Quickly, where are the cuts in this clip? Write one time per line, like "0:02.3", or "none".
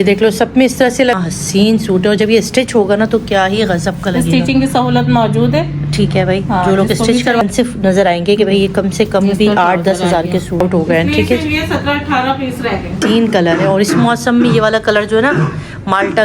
0:01.2
0:07.4
0:10.6
0:12.9